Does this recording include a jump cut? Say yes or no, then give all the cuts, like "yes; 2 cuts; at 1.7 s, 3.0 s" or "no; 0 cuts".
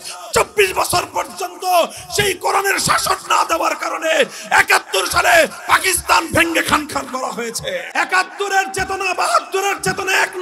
yes; 1 cut; at 7.9 s